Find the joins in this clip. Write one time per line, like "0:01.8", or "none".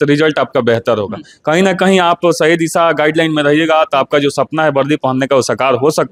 none